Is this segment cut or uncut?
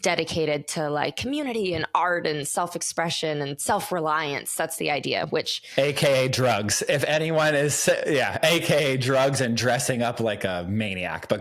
uncut